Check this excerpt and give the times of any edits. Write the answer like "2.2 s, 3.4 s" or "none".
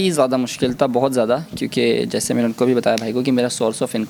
none